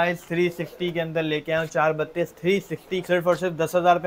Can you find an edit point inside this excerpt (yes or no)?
yes